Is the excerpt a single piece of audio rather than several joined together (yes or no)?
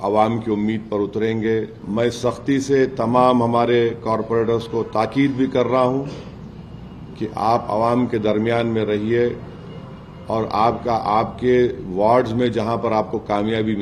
no